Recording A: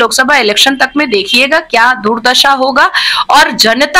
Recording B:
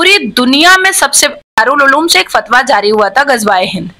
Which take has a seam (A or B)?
B